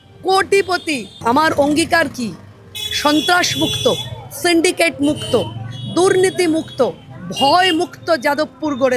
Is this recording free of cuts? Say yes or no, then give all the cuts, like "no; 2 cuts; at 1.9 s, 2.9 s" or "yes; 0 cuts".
no; 1 cut; at 1.2 s